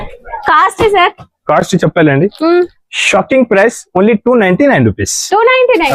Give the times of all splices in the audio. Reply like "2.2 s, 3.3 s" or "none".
none